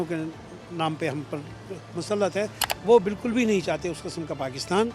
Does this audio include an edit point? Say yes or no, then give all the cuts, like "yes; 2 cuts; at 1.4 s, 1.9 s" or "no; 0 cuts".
yes; 1 cut; at 2.6 s